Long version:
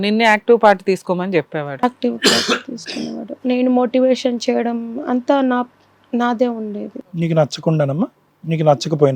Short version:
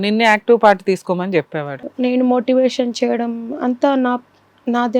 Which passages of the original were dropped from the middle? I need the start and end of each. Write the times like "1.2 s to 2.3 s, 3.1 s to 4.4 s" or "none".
1.7 s to 3.2 s